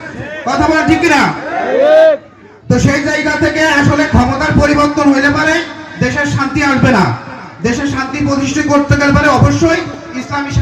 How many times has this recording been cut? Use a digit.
0